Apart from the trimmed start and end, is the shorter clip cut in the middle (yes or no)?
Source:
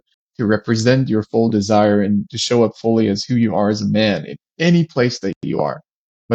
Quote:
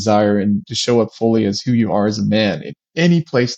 no